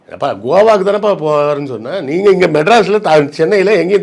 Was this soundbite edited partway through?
no; 0 cuts

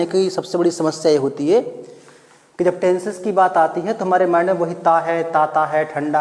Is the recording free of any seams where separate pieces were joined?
yes; 0 cuts

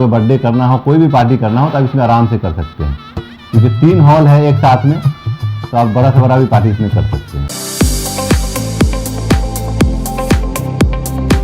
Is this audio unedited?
no; 1 cut; at 7.4 s

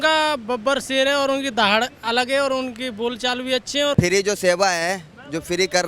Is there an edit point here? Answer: yes; 1 cut; at 3.9 s

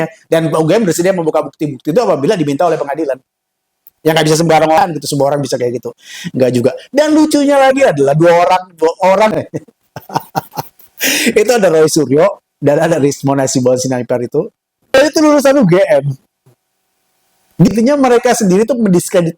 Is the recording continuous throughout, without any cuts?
no; 4 cuts; at 4.8 s, 9.3 s, 15.0 s, 17.7 s

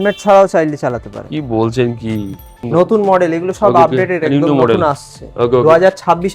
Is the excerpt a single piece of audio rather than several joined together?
no; 1 cut; at 2.5 s

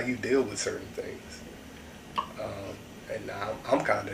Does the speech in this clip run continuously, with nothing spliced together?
yes; 0 cuts

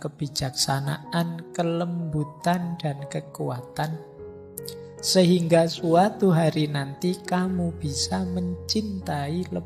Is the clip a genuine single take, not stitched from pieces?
yes; 0 cuts

